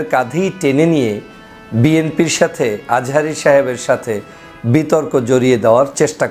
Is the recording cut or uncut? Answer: uncut